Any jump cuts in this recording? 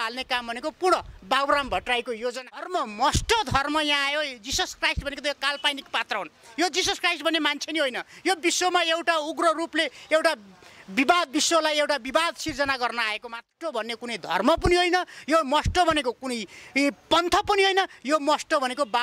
yes; 2 cuts; at 2.7 s, 13.5 s

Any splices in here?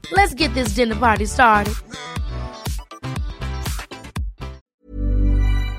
yes; 1 cut; at 4.6 s

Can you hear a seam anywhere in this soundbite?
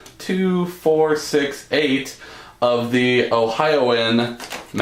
no; 0 cuts

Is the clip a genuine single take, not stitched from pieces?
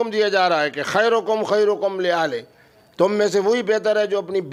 yes; 0 cuts

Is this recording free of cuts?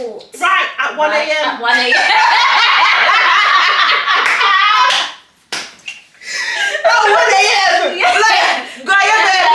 yes; 0 cuts

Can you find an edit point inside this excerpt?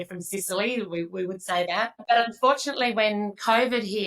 yes; 1 cut; at 2.0 s

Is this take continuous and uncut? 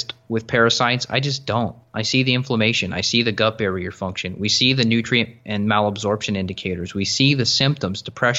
yes; 0 cuts

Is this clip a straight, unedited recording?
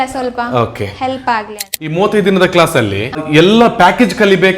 no; 2 cuts; at 1.7 s, 3.2 s

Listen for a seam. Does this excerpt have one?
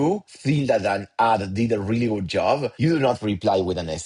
no; 0 cuts

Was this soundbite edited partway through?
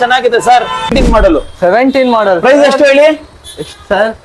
yes; 1 cut; at 0.9 s

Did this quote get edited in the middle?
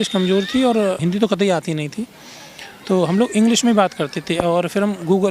yes; 1 cut; at 1.0 s

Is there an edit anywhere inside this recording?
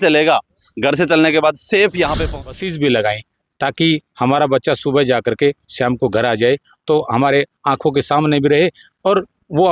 yes; 1 cut; at 2.2 s

